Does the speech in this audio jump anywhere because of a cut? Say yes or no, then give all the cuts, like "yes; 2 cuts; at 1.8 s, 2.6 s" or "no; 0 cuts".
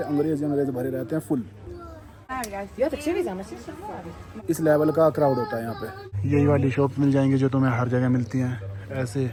no; 0 cuts